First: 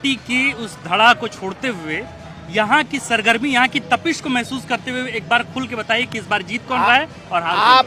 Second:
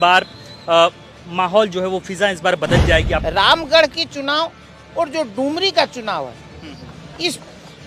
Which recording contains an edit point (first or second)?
second